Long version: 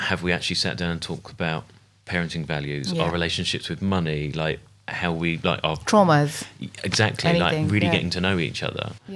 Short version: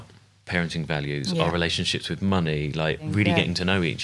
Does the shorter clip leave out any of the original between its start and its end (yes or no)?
yes